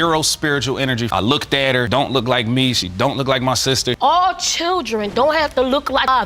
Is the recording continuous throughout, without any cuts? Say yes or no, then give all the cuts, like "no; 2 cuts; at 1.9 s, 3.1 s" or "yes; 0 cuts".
no; 1 cut; at 4.0 s